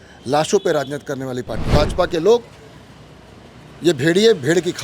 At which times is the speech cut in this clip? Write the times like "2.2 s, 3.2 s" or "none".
1.7 s